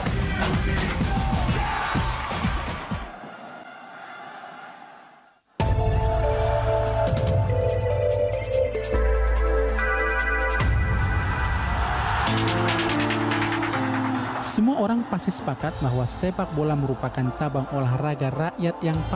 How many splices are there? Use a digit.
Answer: 1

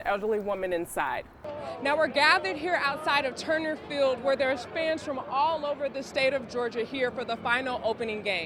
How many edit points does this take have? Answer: 1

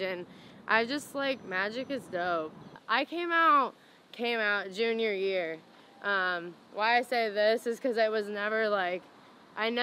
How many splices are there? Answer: 1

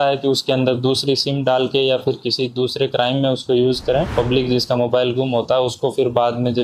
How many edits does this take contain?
1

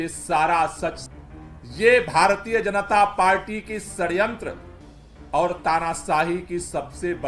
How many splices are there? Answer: 1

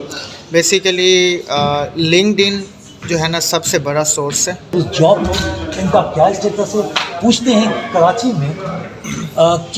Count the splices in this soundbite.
1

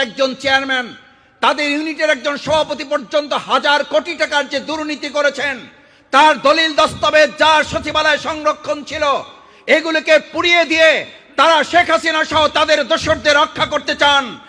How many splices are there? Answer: 0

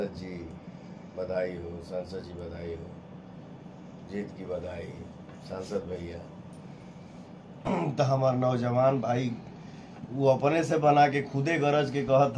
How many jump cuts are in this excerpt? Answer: 1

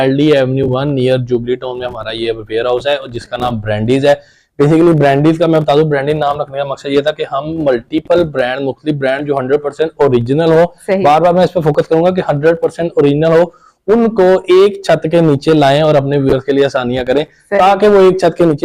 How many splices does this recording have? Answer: 0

